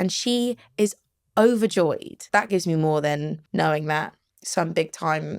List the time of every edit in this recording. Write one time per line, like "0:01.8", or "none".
0:02.2
0:03.4

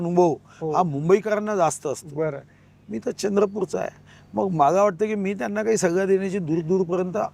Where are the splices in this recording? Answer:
none

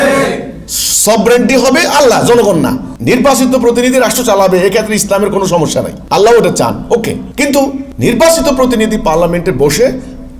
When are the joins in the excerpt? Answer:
0:02.9
0:06.0
0:07.5

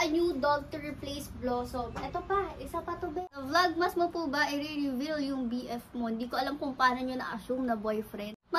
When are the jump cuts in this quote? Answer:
0:03.3

